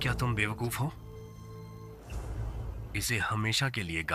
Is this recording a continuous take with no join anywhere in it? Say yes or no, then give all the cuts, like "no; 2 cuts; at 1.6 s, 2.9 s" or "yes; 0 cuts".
no; 1 cut; at 1.9 s